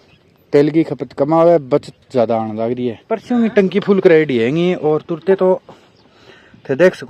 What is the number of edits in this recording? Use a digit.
1